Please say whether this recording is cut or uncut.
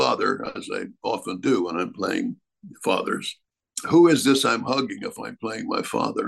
uncut